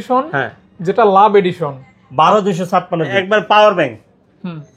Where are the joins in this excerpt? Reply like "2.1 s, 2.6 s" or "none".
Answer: 3.2 s